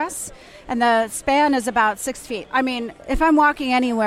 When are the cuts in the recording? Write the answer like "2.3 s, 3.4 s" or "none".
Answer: 2.3 s